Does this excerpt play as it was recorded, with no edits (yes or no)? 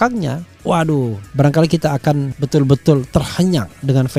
yes